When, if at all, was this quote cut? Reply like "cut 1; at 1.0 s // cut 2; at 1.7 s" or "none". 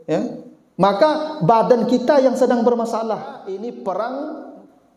cut 1; at 3.4 s

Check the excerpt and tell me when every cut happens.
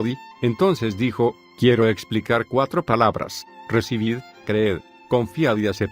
cut 1; at 1.7 s

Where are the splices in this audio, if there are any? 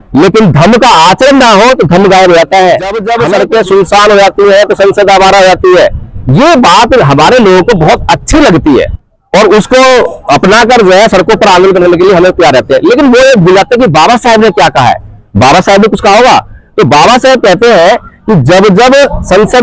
cut 1; at 3.1 s // cut 2; at 9.0 s

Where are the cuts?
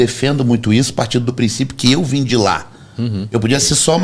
none

